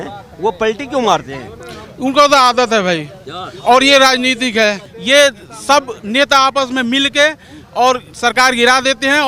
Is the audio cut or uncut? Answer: cut